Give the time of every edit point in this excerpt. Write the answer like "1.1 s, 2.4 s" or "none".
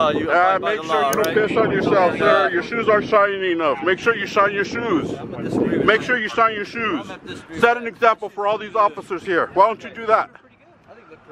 none